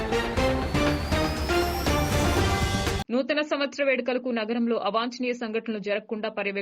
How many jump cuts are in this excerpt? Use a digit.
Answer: 1